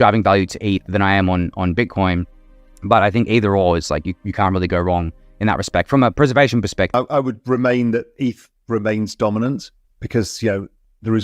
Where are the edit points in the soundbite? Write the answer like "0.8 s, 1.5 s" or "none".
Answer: 6.9 s